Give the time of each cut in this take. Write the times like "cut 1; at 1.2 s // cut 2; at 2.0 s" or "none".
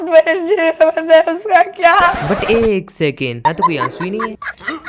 none